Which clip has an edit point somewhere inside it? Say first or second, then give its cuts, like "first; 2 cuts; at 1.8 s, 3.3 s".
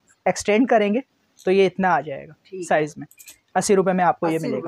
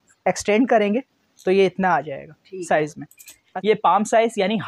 second; 1 cut; at 3.5 s